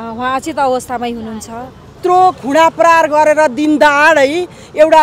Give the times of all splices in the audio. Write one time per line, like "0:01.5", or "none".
0:02.0